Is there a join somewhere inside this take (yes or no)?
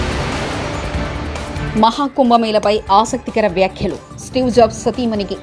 no